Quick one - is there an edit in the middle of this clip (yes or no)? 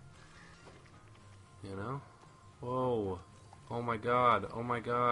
no